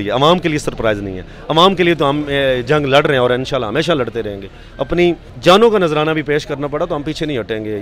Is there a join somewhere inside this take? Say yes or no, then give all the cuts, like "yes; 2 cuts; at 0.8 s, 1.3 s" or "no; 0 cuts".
no; 0 cuts